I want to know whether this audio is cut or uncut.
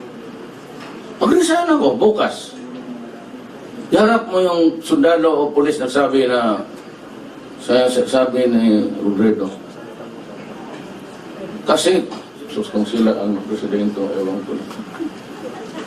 uncut